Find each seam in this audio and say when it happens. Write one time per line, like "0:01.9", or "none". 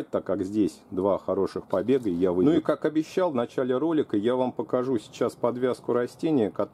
0:02.4